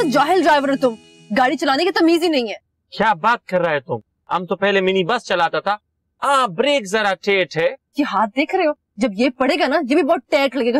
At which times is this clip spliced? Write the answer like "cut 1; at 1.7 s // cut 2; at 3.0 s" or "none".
none

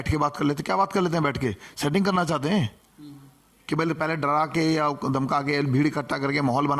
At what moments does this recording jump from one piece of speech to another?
none

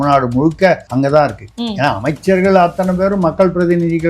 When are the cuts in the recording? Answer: cut 1; at 0.8 s // cut 2; at 1.5 s

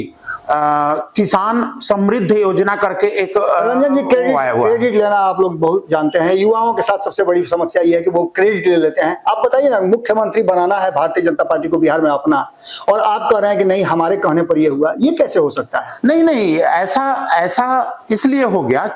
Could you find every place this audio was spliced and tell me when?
none

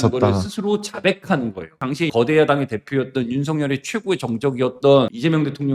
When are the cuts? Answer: cut 1; at 1.8 s

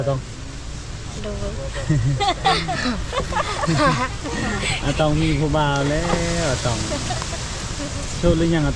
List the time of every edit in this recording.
none

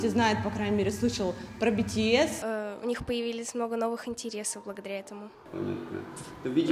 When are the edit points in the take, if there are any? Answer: cut 1; at 2.4 s

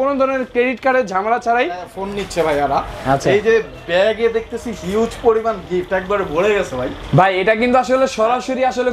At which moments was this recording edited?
cut 1; at 2.0 s

